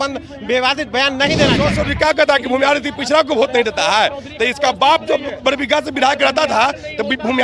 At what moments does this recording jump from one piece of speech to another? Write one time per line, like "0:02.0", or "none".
0:01.7